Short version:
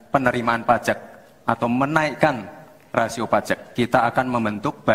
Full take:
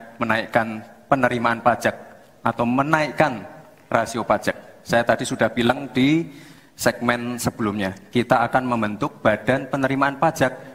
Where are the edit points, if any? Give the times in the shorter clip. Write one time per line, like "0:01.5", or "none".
0:03.7